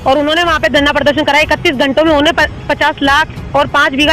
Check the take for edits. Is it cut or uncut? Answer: uncut